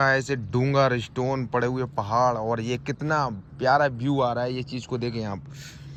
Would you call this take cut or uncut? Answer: uncut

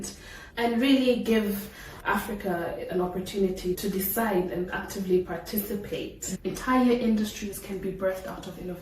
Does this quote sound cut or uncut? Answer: cut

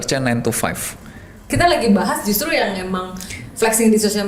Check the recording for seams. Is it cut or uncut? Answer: cut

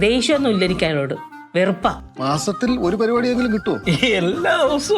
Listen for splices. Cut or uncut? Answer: cut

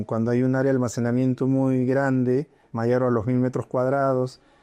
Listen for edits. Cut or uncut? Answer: uncut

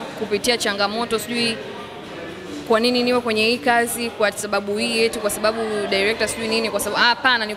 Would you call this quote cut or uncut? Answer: uncut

